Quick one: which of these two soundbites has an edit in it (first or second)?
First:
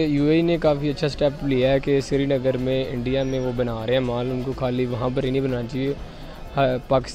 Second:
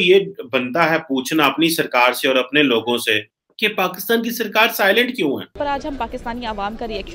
second